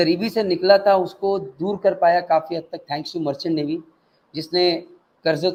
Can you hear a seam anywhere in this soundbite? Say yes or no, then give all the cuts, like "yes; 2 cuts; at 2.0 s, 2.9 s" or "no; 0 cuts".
no; 0 cuts